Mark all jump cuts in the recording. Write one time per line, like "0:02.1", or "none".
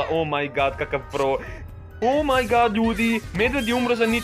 0:01.6